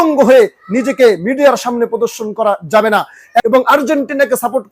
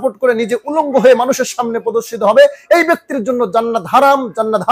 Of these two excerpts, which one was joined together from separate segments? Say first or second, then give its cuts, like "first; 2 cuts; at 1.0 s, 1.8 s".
first; 1 cut; at 3.4 s